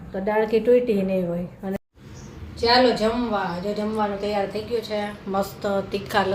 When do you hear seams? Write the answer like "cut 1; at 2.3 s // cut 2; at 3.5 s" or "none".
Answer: cut 1; at 1.8 s